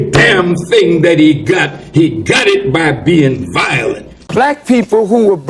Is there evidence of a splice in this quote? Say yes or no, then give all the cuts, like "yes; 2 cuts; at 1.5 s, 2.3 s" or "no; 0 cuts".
yes; 1 cut; at 4.1 s